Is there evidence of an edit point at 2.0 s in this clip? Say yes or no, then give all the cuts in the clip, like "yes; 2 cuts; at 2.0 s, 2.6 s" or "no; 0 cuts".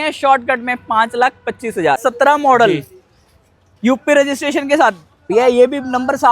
yes; 1 cut; at 2.0 s